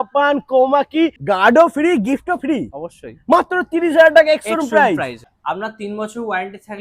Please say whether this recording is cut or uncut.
cut